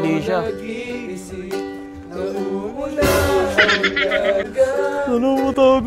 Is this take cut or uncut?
cut